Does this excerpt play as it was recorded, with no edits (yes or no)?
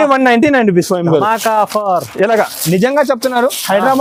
yes